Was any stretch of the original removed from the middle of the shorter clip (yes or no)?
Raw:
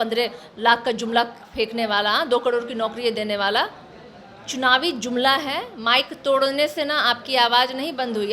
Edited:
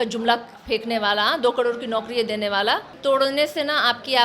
yes